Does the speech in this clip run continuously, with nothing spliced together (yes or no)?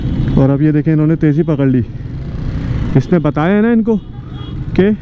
yes